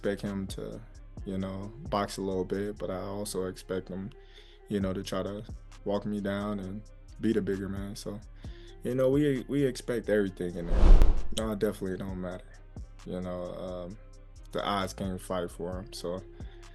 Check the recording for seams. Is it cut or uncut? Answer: uncut